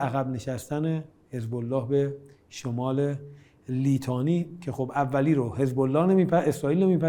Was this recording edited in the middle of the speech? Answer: no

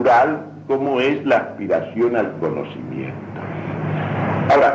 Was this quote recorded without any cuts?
no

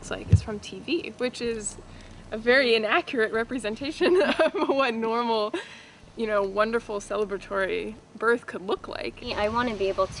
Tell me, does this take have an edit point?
yes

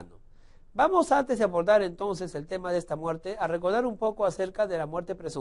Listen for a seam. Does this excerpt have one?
no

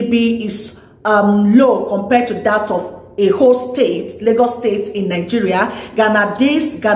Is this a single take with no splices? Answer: yes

